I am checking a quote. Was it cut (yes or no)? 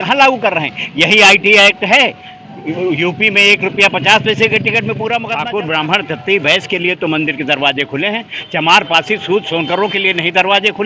yes